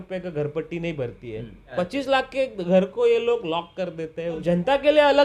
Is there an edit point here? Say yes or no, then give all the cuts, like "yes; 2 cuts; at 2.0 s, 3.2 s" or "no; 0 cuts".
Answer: yes; 2 cuts; at 1.6 s, 4.4 s